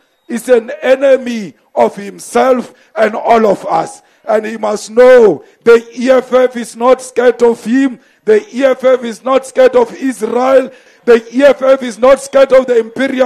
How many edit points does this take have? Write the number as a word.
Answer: one